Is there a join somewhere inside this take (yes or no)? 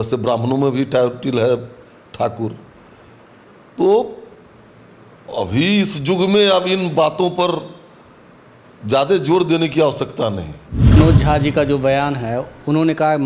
yes